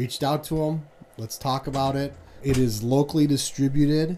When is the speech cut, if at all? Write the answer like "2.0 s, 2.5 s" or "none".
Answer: 2.4 s